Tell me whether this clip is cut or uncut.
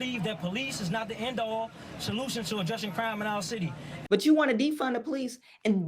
cut